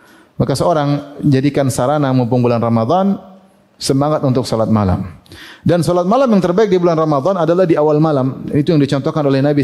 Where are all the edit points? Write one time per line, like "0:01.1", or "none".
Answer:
none